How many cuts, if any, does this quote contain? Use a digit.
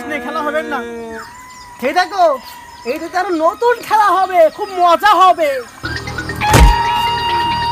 1